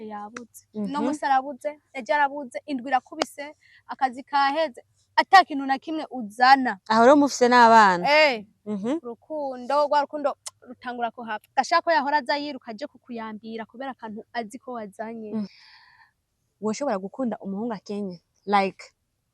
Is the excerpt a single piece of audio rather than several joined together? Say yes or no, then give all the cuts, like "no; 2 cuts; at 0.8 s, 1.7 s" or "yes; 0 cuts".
no; 1 cut; at 15.5 s